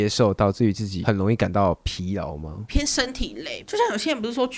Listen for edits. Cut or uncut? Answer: cut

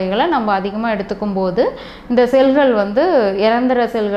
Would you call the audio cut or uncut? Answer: uncut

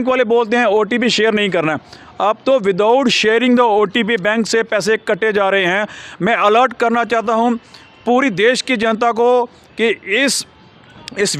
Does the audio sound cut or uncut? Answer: uncut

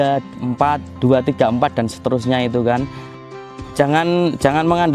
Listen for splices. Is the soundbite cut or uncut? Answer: cut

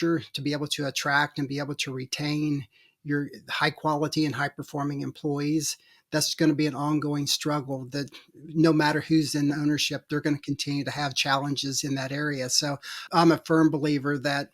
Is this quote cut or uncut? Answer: cut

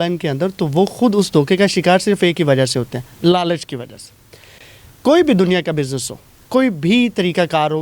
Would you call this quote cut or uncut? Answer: uncut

